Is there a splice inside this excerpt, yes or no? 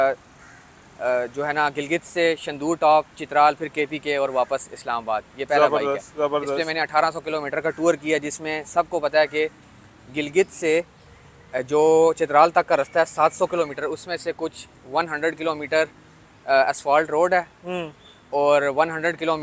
no